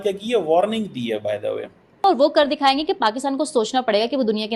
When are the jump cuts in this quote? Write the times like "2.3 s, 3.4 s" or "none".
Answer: 2.0 s